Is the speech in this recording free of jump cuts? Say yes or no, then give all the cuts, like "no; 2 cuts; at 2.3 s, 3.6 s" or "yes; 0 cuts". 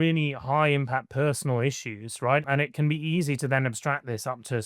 no; 1 cut; at 2.5 s